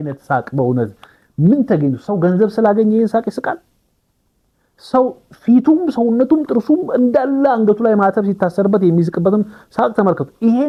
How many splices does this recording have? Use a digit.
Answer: 0